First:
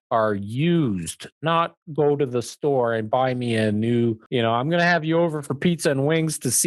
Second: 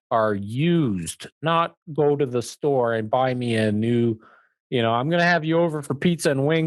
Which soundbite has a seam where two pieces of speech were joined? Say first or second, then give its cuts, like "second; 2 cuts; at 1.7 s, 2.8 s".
first; 1 cut; at 4.2 s